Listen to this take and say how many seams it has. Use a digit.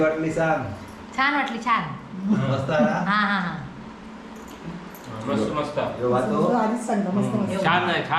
0